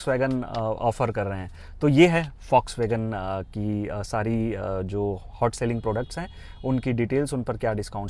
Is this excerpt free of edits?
yes; 0 cuts

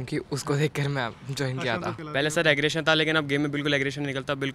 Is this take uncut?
no; 1 cut; at 2.0 s

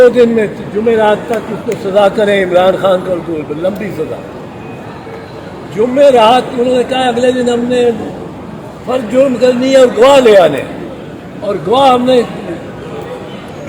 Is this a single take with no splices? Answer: yes; 0 cuts

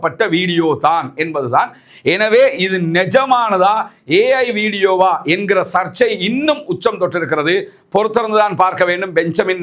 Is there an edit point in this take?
no; 0 cuts

